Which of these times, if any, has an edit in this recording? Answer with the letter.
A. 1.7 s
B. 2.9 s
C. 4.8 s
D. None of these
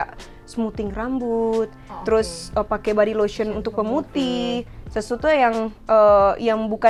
D